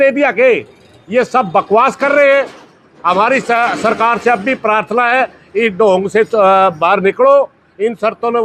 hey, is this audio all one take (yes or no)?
yes